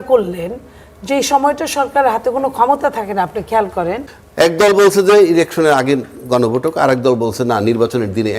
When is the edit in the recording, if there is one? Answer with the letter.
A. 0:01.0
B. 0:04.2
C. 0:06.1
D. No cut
B